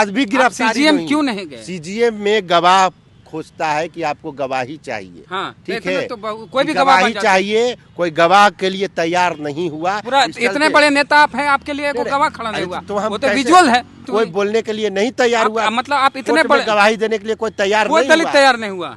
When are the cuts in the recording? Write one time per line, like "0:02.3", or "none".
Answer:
0:14.1